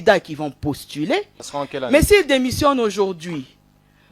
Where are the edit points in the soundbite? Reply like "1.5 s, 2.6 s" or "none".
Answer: 1.4 s